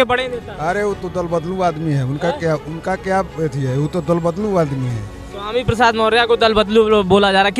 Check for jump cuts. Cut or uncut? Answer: uncut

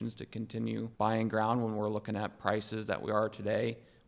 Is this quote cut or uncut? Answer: cut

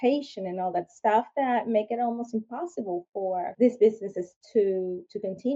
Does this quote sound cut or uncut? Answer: cut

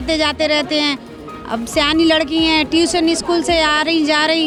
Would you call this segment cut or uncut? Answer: uncut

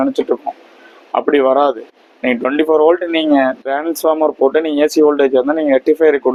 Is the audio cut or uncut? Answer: uncut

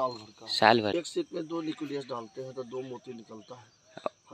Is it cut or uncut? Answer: cut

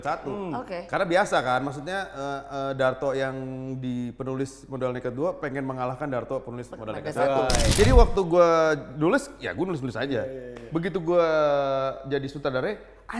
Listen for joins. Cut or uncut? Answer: cut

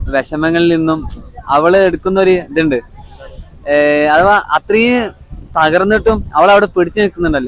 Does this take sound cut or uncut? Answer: uncut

